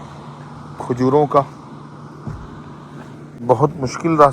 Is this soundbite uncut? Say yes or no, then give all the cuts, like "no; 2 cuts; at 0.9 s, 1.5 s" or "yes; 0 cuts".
no; 1 cut; at 3.4 s